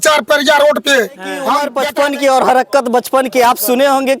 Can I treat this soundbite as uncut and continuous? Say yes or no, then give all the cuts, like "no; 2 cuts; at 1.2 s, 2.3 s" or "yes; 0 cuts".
no; 1 cut; at 1.7 s